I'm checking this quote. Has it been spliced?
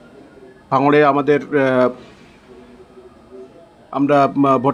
no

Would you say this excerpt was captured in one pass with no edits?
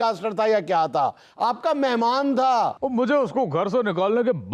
no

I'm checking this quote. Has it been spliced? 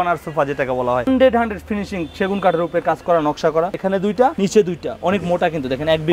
yes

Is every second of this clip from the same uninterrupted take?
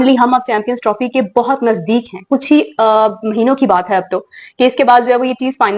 yes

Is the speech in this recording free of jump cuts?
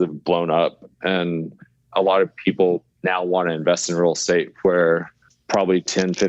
yes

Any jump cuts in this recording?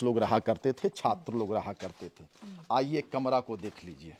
no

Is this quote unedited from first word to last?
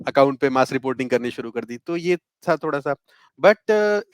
no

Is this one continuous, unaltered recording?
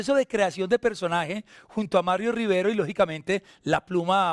yes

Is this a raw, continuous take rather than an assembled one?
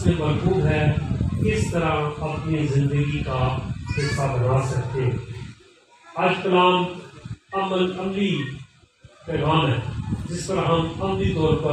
yes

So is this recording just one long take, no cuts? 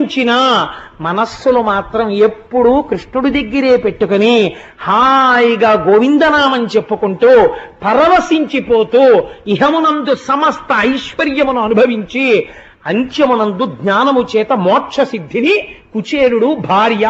yes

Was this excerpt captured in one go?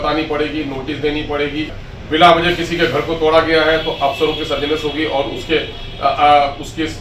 no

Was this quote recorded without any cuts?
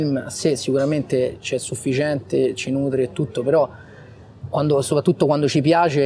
yes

